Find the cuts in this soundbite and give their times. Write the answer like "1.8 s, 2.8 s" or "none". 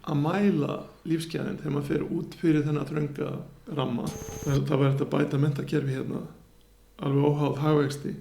4.3 s